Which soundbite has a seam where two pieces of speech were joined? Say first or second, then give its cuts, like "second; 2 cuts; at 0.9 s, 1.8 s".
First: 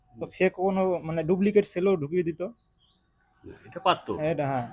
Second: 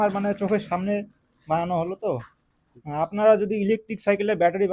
second; 1 cut; at 2.7 s